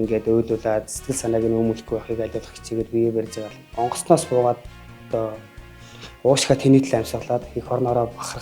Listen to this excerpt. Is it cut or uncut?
cut